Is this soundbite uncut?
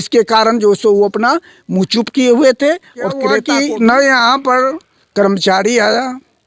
no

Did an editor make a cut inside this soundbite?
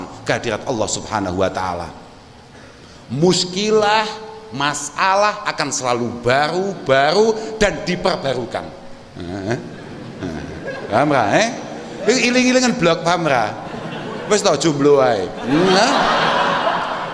no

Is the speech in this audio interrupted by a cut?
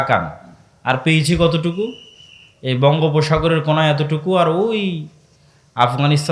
no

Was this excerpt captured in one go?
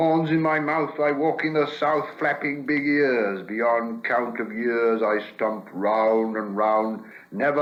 yes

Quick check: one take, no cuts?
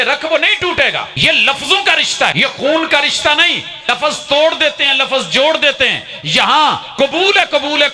no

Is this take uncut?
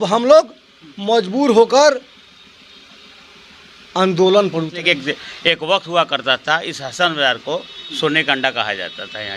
no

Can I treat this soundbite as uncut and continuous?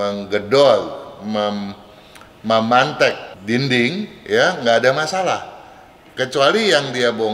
no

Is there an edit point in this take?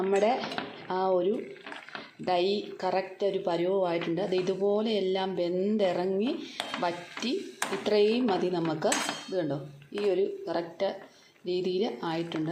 no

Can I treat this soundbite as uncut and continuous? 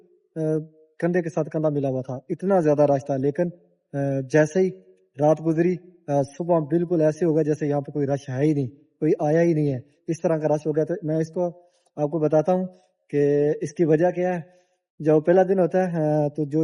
yes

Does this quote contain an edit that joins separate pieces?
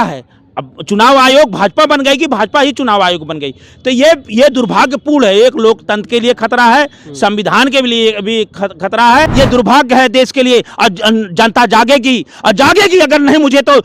yes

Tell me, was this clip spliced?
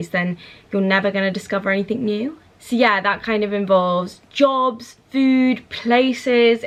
no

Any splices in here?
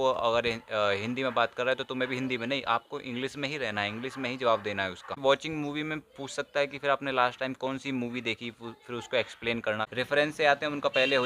yes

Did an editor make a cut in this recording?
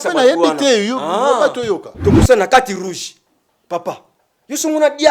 yes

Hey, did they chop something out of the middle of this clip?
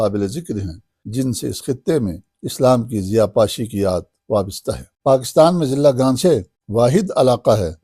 yes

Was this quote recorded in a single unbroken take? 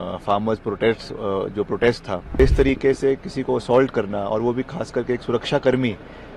no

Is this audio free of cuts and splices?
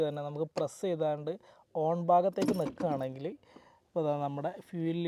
yes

